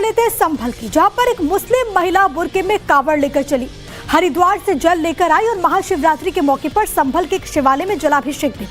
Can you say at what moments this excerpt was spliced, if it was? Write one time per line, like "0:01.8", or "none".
0:06.6